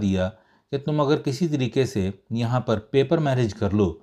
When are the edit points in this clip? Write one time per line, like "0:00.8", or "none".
none